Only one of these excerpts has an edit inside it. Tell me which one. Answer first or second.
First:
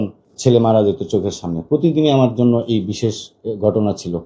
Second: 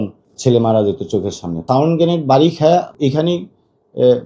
second